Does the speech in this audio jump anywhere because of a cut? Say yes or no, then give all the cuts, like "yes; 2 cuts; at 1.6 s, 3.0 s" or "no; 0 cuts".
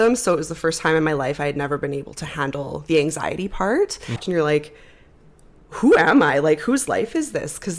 yes; 1 cut; at 4.1 s